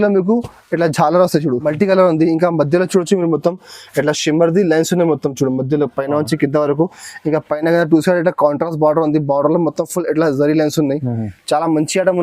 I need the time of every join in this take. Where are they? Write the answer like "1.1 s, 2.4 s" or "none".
1.6 s